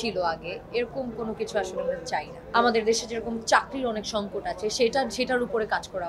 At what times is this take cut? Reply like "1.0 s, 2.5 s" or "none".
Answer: 2.4 s